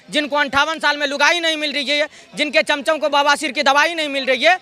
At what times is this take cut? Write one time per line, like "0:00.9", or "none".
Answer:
none